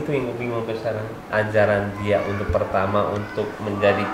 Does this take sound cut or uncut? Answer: cut